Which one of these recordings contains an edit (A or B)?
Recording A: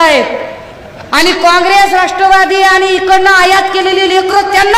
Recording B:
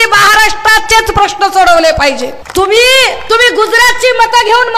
B